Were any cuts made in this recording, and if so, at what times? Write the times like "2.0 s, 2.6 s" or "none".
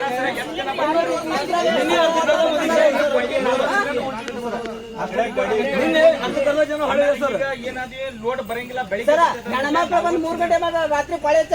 none